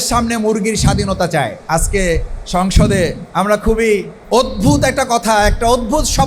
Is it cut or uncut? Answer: cut